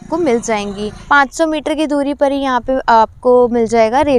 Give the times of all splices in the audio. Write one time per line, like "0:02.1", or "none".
0:00.9